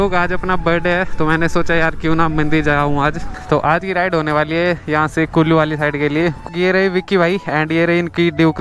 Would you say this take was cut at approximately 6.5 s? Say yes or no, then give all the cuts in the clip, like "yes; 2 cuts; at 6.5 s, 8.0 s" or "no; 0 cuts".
yes; 2 cuts; at 3.3 s, 6.5 s